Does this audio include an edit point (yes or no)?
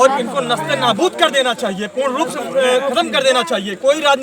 no